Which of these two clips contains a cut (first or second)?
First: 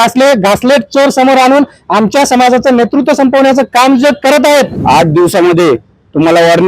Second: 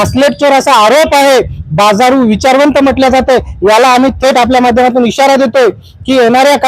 first